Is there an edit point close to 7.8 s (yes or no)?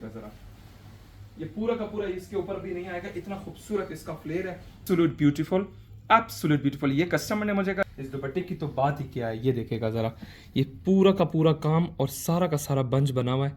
yes